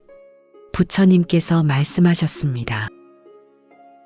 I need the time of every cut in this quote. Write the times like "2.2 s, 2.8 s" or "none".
3.1 s